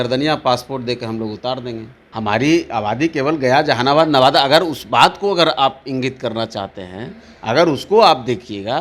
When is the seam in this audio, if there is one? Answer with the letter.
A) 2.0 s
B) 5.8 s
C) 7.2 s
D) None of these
A